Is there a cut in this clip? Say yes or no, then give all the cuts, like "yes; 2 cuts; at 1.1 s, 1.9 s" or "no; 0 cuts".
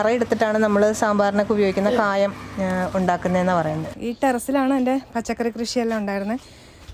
no; 0 cuts